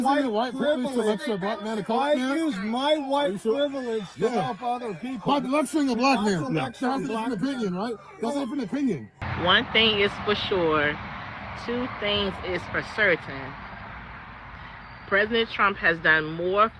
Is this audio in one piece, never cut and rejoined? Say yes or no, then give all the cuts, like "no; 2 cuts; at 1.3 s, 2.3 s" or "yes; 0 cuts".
no; 1 cut; at 9.2 s